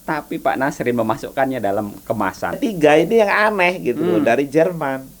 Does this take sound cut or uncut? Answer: cut